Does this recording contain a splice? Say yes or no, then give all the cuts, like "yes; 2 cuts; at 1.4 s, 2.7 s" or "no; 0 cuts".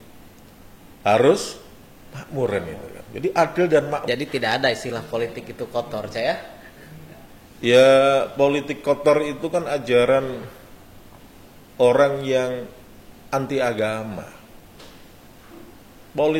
yes; 1 cut; at 4.0 s